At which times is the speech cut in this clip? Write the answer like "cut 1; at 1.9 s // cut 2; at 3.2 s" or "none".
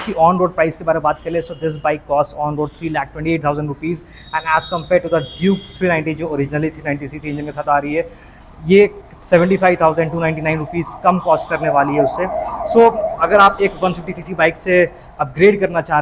none